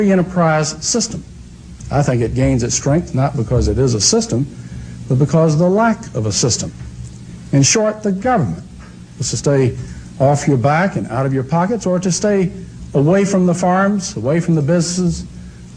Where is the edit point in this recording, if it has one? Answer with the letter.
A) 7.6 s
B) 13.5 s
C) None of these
A